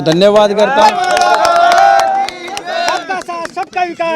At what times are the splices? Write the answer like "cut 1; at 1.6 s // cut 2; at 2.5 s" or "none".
none